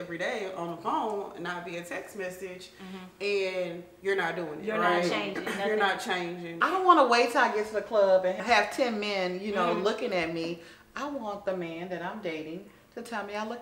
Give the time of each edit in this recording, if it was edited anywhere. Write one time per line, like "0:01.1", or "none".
0:06.6
0:08.4